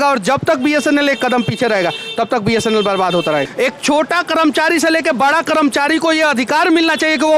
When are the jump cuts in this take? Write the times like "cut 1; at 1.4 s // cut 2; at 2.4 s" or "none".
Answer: cut 1; at 3.5 s